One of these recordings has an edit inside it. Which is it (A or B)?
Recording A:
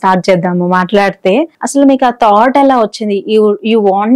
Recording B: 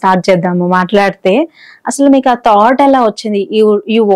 A